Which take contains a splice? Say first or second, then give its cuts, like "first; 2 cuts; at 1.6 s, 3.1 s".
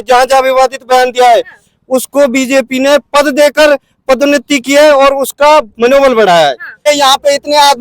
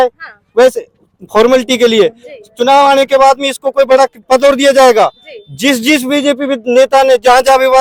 first; 1 cut; at 6.8 s